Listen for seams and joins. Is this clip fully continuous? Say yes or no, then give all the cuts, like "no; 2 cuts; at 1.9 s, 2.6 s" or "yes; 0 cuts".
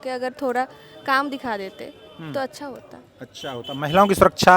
yes; 0 cuts